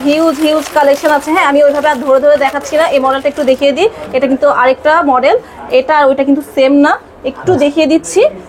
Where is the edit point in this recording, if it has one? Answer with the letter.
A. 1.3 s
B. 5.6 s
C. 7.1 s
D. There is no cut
D